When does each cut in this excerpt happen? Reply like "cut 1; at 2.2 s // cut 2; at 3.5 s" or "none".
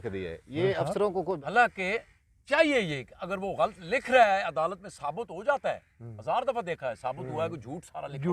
cut 1; at 1.4 s